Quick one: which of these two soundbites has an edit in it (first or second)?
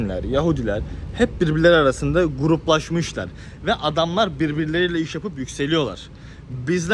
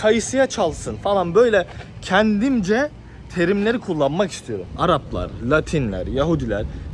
second